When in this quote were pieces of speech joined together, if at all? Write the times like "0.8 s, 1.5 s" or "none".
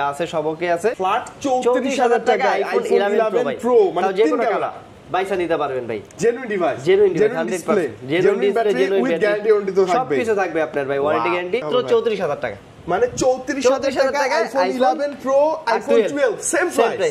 1.0 s, 11.7 s